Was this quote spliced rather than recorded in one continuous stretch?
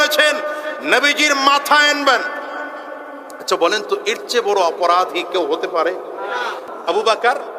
yes; 1 cut; at 6.7 s

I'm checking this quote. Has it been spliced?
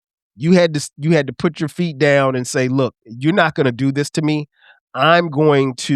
no; 0 cuts

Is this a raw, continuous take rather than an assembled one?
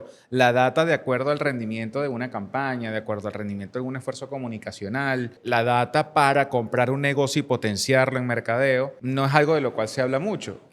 no; 2 cuts; at 5.4 s, 9.0 s

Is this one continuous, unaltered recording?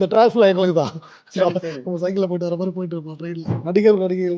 no; 1 cut; at 3.5 s

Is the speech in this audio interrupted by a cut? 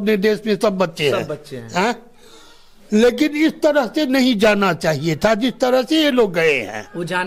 no; 0 cuts

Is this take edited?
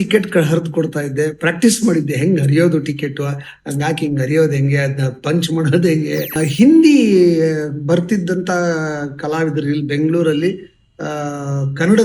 yes; 1 cut; at 6.3 s

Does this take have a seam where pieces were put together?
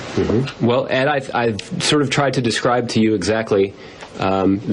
yes; 1 cut; at 1.8 s

